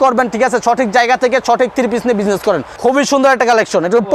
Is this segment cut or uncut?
cut